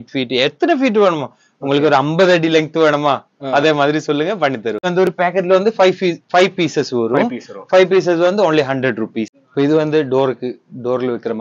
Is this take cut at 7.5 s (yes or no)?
no